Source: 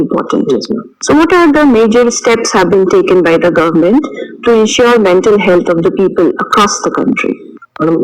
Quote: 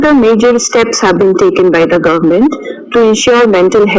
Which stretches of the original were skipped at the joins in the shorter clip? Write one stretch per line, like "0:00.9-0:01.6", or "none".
none